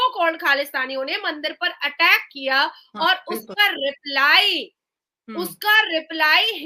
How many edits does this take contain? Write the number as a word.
zero